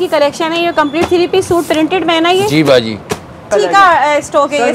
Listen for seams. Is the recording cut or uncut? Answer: cut